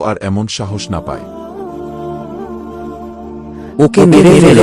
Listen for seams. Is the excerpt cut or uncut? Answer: uncut